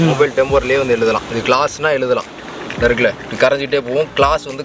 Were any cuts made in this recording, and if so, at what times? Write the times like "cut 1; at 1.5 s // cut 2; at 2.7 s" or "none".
none